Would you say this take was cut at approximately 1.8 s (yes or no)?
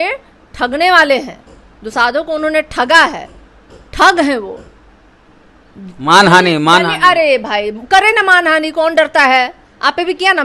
no